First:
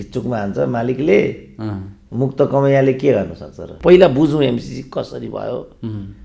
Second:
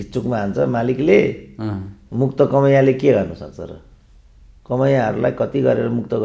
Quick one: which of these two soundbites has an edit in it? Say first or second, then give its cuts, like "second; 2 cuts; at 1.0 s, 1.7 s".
first; 1 cut; at 3.7 s